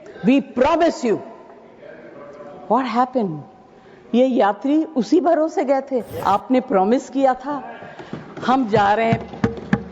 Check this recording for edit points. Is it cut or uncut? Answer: cut